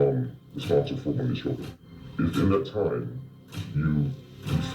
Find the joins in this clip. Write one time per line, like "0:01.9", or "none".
0:01.8